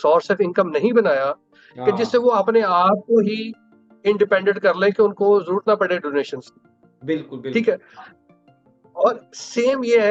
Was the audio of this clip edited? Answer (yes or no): no